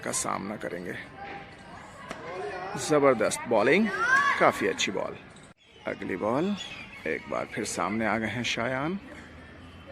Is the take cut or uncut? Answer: cut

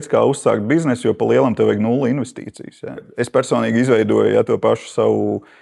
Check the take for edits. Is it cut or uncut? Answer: cut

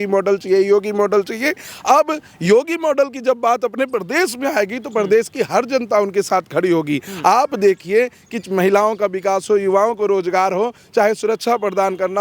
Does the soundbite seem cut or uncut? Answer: uncut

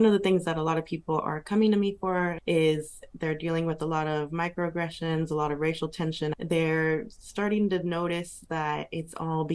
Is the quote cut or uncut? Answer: cut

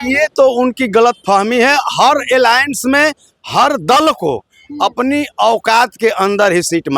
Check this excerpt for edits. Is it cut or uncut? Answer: uncut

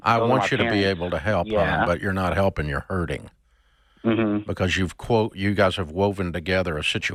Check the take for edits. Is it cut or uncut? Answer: uncut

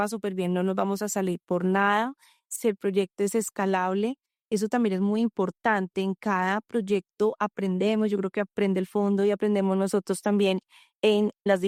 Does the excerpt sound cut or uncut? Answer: uncut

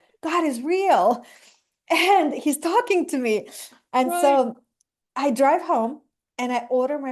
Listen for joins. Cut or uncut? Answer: uncut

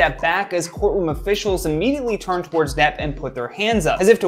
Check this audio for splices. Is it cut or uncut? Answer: uncut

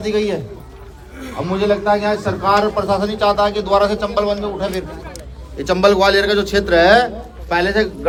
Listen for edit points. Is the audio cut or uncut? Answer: uncut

